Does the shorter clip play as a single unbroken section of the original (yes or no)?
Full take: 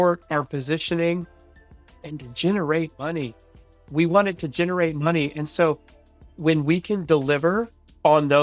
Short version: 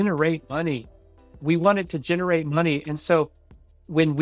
yes